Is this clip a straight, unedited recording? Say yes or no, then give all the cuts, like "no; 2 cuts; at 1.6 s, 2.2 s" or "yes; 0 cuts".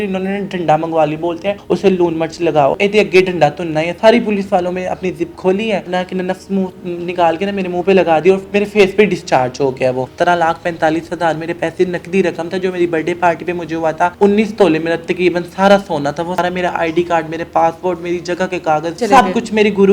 no; 8 cuts; at 1.6 s, 2.7 s, 3.9 s, 5.9 s, 10.1 s, 14.1 s, 16.4 s, 19.0 s